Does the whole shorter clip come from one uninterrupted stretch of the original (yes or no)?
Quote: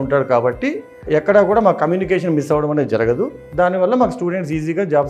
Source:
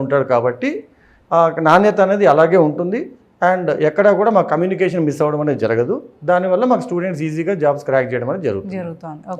no